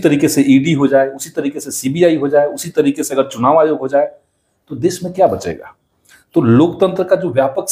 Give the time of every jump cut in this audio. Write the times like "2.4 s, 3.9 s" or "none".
none